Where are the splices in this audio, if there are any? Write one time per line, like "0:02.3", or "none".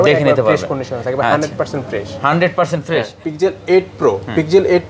0:03.2